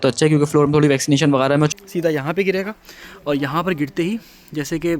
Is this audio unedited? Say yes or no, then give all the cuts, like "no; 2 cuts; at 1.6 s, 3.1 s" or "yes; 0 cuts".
no; 1 cut; at 1.7 s